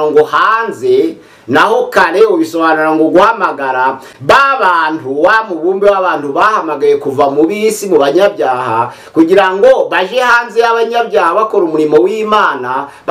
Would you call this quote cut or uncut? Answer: uncut